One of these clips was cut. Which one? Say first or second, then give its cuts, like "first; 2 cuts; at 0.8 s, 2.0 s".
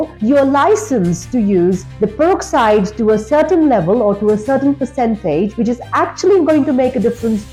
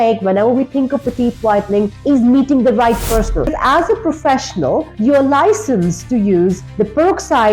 second; 1 cut; at 3.5 s